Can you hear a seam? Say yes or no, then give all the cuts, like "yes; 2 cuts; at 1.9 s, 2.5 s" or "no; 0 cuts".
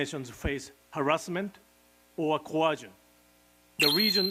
no; 0 cuts